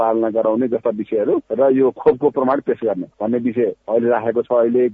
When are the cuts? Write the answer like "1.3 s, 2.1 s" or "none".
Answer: 1.5 s, 3.6 s

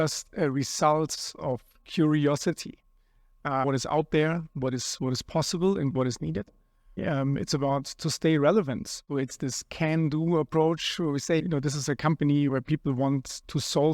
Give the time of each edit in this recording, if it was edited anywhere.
3.6 s, 7.0 s, 9.1 s

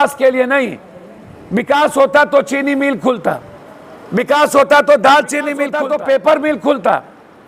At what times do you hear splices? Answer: 5.8 s

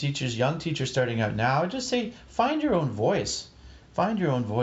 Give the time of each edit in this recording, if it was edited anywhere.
none

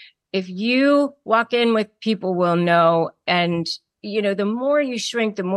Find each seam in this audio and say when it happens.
1.9 s, 3.2 s

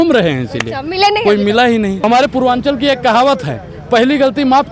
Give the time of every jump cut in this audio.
2.0 s

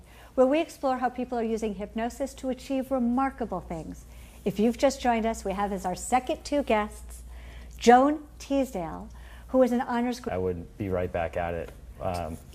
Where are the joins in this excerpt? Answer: none

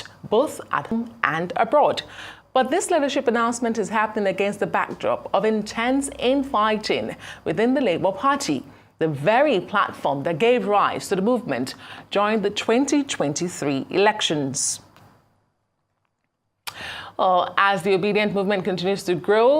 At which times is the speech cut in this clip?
0.9 s

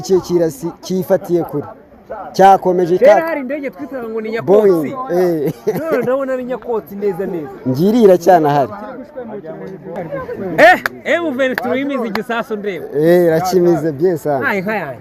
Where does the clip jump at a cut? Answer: 9.9 s

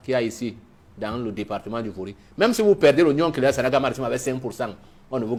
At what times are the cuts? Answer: none

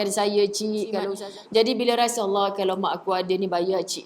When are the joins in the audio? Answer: 1.1 s

